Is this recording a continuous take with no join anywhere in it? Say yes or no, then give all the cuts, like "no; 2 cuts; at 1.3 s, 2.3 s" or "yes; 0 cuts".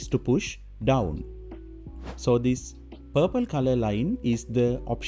yes; 0 cuts